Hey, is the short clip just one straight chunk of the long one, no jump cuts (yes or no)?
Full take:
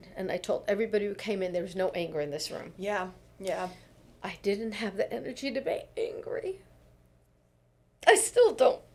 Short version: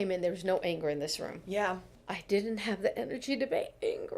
no